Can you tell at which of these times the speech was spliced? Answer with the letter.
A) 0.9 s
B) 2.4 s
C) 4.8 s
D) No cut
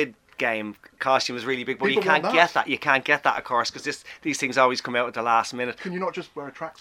A